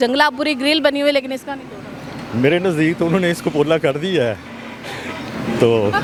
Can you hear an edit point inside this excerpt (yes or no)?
no